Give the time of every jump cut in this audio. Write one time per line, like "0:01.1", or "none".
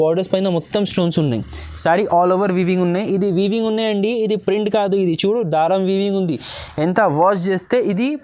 none

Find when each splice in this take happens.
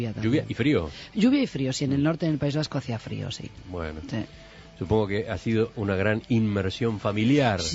0:01.8

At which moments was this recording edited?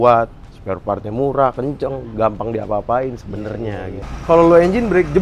0:04.0

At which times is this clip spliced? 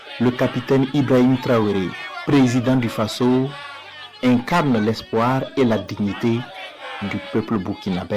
none

